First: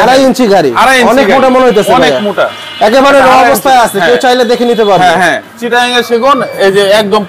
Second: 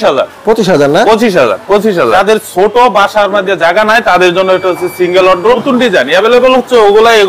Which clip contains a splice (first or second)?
second